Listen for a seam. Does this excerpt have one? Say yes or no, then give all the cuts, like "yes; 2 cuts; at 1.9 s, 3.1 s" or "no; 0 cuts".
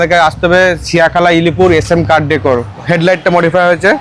yes; 1 cut; at 2.6 s